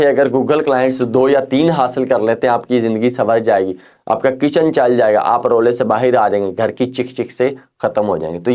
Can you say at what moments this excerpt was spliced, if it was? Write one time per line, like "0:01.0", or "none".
none

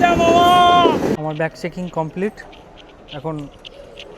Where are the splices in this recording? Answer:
0:01.1

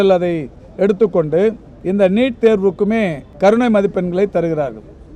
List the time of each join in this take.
0:01.7
0:03.2

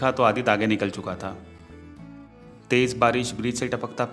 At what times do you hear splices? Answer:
none

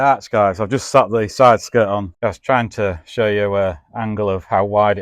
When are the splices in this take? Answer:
0:02.1

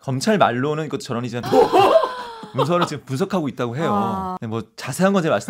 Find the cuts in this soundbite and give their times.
0:01.4
0:04.4

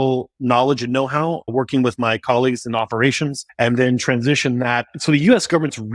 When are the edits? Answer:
0:01.5
0:03.4
0:04.9

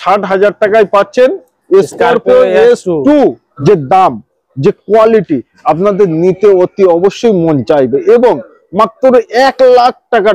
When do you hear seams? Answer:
0:03.5

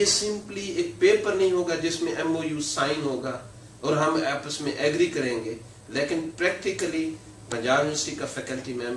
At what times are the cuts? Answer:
none

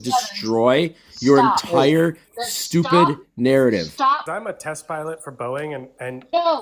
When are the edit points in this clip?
0:04.2

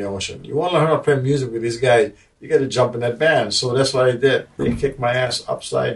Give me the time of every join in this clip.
0:04.5

